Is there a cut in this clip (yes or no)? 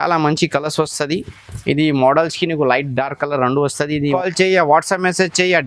yes